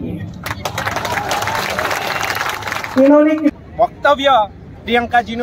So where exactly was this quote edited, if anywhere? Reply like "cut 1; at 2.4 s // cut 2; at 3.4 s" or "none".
cut 1; at 3.5 s

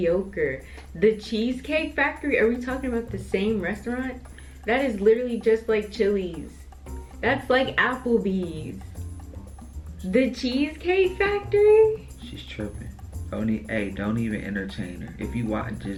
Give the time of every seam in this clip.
none

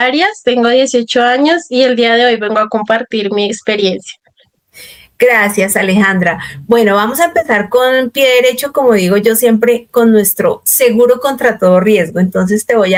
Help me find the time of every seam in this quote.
none

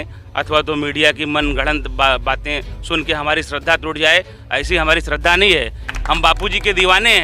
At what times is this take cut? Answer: cut 1; at 5.9 s

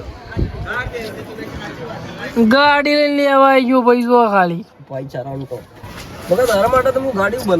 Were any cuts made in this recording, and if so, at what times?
cut 1; at 5.9 s

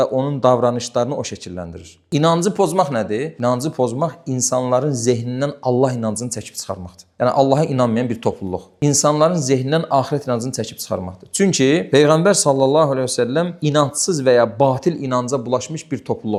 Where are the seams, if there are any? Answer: none

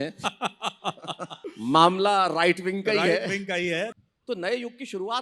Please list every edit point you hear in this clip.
cut 1; at 1.3 s // cut 2; at 3.9 s

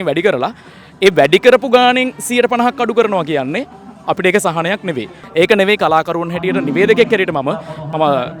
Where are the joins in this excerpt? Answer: cut 1; at 5.2 s

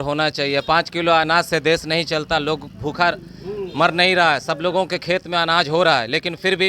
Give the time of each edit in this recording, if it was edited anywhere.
none

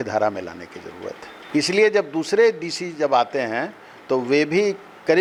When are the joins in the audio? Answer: none

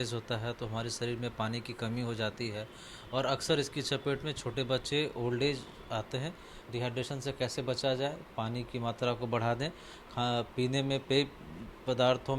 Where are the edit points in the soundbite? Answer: cut 1; at 6.6 s

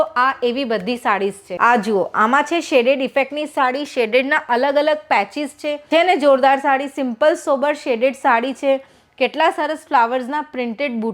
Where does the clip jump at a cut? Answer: cut 1; at 1.5 s // cut 2; at 5.8 s

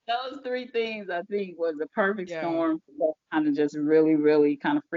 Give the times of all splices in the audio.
none

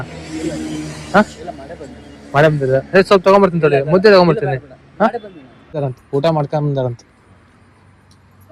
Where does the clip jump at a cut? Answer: cut 1; at 5.8 s

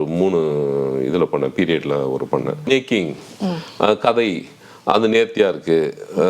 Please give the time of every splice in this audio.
cut 1; at 2.6 s

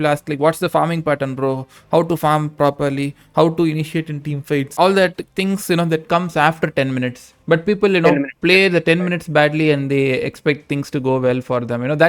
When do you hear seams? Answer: cut 1; at 4.7 s

